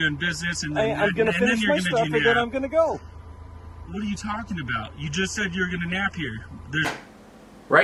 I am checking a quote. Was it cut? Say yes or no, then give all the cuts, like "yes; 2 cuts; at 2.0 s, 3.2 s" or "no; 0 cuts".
no; 0 cuts